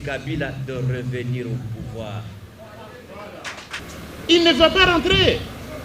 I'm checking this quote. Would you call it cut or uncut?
cut